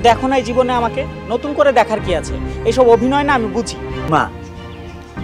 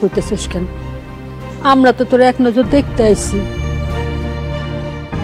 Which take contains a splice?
first; 1 cut; at 4.1 s

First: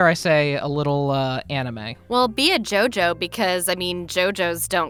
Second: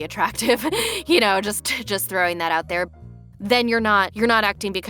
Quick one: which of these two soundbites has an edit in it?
second; 1 cut; at 2.9 s

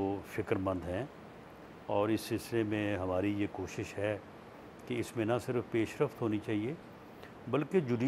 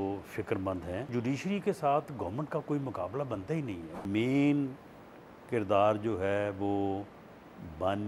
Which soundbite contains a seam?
second; 2 cuts; at 1.1 s, 4.0 s

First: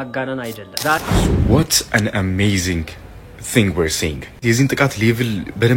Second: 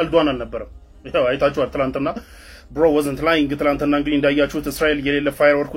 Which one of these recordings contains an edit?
first; 1 cut; at 1.1 s

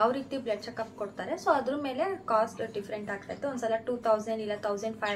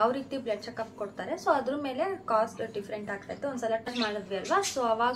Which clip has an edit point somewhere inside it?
second; 1 cut; at 3.9 s

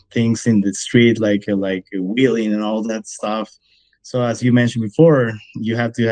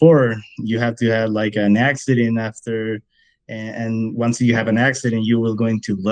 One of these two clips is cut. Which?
first; 1 cut; at 3.6 s

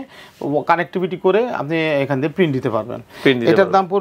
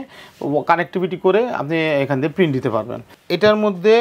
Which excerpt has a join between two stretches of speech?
second; 1 cut; at 3.1 s

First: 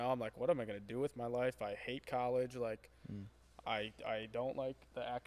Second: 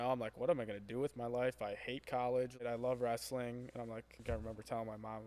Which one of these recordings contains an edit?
second; 2 cuts; at 2.6 s, 4.2 s

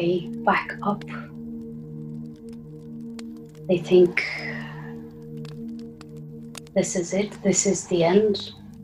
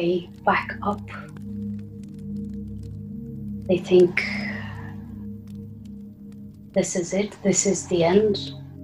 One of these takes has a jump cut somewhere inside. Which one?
first; 2 cuts; at 1.0 s, 3.6 s

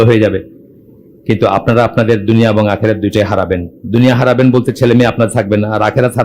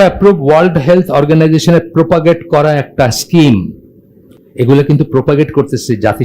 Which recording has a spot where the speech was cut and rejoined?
second; 1 cut; at 4.5 s

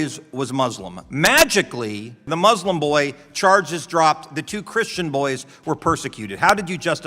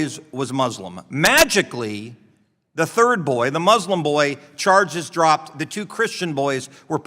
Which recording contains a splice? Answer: first; 1 cut; at 2.3 s

